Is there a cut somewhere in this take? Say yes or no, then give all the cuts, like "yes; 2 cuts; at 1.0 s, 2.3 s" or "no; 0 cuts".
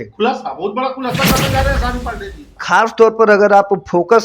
yes; 1 cut; at 2.6 s